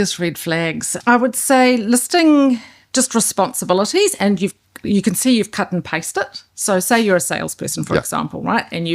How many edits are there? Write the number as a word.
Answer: one